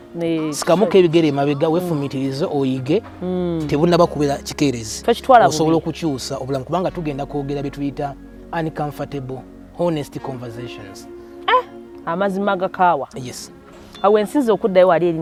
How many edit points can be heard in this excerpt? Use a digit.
0